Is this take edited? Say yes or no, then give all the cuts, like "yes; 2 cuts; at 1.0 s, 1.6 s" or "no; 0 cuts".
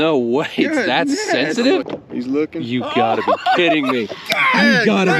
yes; 1 cut; at 1.8 s